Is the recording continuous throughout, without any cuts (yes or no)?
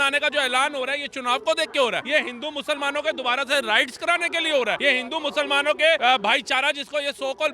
no